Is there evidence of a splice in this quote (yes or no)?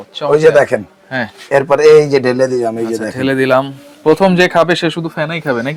no